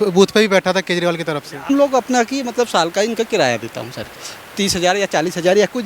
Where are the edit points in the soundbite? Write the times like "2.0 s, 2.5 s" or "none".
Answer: 1.7 s